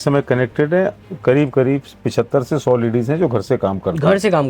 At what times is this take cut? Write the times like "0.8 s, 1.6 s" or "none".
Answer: none